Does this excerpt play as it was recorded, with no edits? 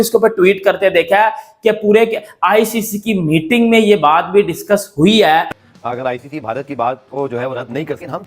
no; 1 cut; at 5.6 s

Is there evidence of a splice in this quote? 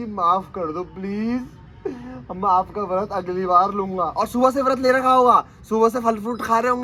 no; 0 cuts

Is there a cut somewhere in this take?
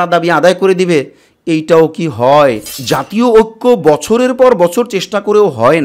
yes; 1 cut; at 2.7 s

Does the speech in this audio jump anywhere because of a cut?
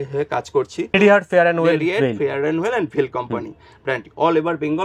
yes; 1 cut; at 0.9 s

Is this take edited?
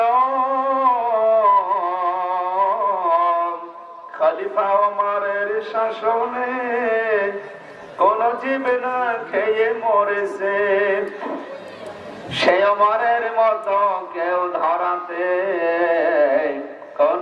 no; 0 cuts

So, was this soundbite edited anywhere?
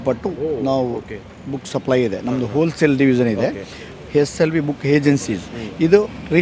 no; 0 cuts

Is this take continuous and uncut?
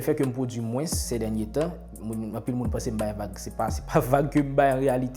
yes; 0 cuts

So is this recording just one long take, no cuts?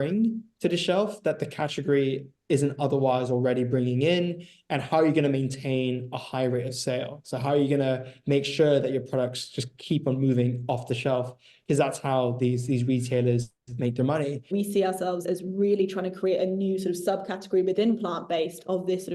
no; 1 cut; at 14.5 s

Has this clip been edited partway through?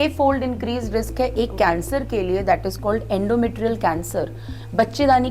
no; 0 cuts

